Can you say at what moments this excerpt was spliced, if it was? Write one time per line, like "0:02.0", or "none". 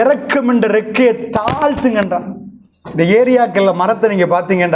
none